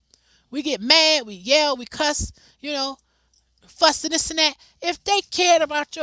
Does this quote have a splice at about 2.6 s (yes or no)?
no